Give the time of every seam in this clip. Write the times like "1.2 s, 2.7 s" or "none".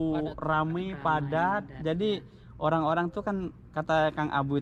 none